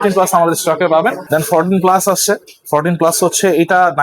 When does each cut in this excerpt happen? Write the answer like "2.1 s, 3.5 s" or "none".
1.2 s